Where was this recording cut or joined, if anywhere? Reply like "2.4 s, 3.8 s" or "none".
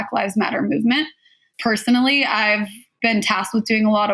1.5 s, 3.0 s